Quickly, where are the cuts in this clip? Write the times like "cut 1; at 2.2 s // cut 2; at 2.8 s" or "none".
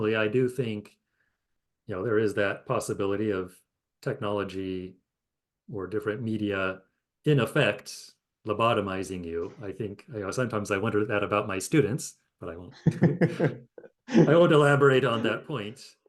none